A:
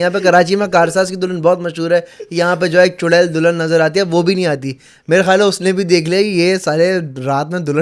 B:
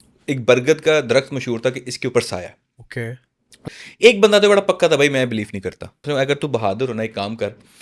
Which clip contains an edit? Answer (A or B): B